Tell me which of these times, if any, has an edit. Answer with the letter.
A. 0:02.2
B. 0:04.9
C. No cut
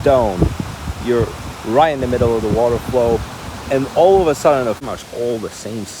B